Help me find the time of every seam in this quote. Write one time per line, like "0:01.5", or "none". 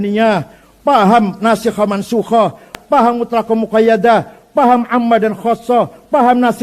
0:02.7